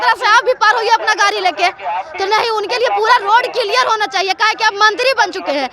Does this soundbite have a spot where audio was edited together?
no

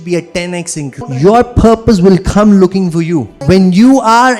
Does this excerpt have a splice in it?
yes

